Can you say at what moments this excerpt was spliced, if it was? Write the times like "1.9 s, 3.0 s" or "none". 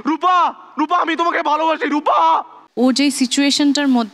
2.6 s